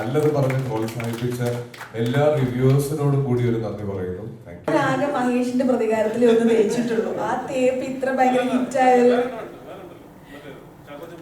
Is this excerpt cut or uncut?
cut